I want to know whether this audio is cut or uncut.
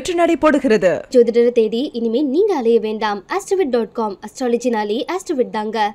uncut